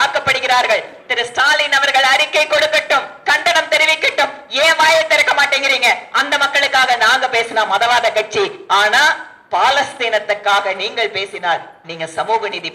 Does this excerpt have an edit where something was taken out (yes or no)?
no